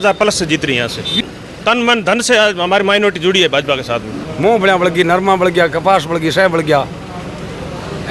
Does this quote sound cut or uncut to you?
cut